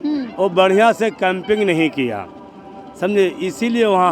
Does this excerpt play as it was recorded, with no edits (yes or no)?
yes